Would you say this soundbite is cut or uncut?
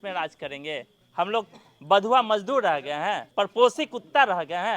cut